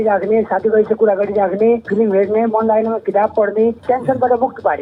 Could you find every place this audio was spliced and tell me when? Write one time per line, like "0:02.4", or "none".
0:01.9
0:03.8